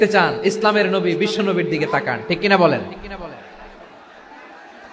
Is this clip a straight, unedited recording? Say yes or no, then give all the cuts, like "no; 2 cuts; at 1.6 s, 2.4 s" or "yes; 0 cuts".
yes; 0 cuts